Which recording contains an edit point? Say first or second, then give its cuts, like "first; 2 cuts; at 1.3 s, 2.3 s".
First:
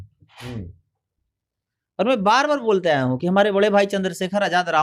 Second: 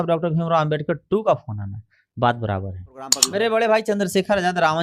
second; 1 cut; at 3.2 s